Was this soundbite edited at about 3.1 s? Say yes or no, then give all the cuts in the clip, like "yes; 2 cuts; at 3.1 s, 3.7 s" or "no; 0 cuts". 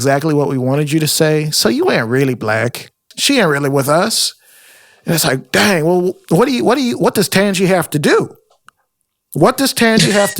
yes; 1 cut; at 3.1 s